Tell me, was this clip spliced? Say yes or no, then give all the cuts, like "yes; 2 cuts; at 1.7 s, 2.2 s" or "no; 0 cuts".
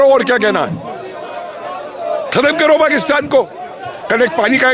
no; 0 cuts